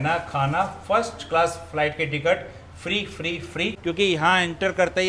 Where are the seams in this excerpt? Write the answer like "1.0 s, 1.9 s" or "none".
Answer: 3.8 s

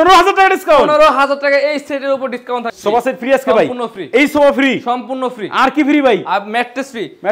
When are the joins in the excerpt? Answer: 2.7 s

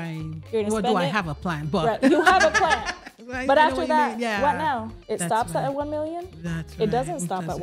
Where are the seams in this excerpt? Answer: none

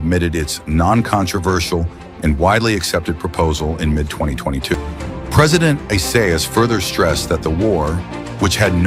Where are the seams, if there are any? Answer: 4.8 s

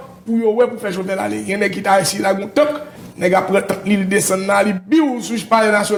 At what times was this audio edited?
none

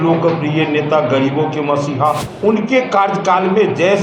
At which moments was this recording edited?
2.3 s

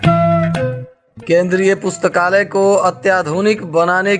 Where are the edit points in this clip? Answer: 1.0 s

